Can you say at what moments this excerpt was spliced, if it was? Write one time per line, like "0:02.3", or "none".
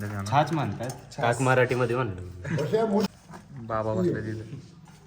0:03.1